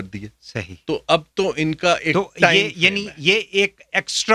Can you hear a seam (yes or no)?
no